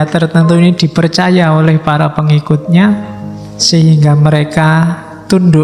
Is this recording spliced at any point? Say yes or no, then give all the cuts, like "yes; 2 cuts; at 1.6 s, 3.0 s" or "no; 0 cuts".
no; 0 cuts